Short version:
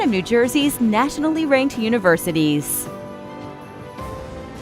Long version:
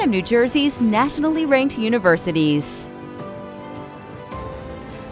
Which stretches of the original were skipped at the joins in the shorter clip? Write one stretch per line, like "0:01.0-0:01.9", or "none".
0:02.7-0:03.0